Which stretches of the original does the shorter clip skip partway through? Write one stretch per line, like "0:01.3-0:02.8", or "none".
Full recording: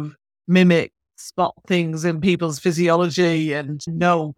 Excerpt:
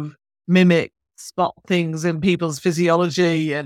none